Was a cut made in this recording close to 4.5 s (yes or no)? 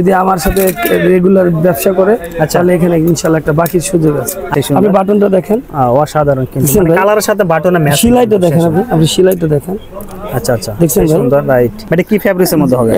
yes